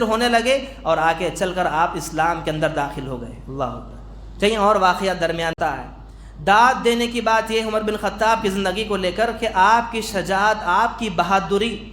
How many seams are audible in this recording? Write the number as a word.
one